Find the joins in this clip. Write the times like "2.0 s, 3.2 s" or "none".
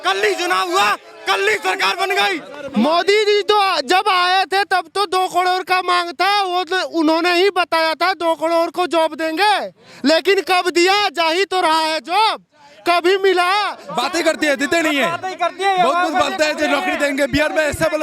2.6 s, 13.8 s